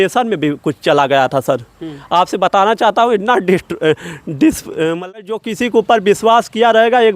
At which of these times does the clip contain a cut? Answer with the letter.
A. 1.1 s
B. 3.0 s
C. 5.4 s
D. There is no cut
C